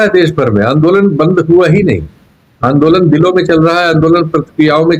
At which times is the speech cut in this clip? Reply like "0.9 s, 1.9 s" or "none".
none